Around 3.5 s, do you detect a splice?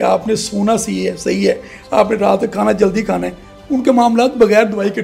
no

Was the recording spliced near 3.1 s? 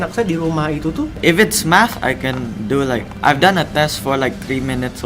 yes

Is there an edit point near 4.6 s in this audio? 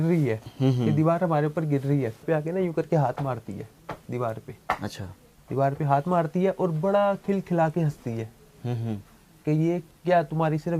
no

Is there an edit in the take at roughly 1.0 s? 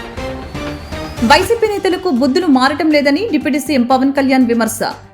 yes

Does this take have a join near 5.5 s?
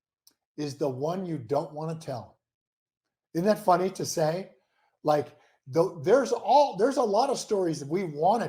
no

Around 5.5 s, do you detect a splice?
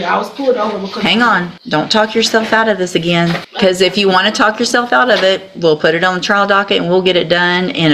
no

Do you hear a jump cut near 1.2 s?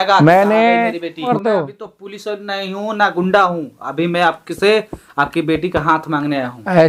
yes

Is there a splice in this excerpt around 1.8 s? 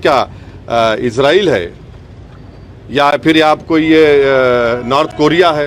no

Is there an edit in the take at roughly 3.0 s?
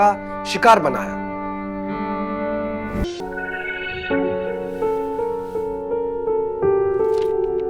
yes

